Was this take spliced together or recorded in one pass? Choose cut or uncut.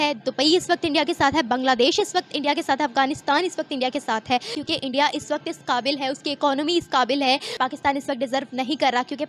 cut